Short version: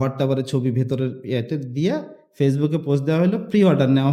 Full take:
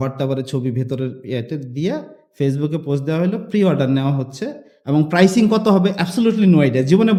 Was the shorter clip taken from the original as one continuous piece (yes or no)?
yes